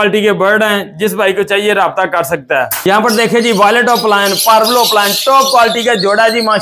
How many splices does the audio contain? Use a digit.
1